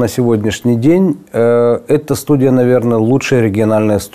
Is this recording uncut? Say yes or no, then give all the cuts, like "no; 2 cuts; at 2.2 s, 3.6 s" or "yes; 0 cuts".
yes; 0 cuts